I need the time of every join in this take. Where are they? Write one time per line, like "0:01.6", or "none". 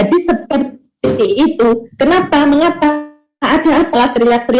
none